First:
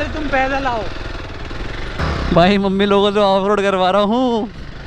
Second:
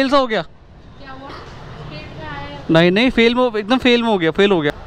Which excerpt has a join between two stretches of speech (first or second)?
first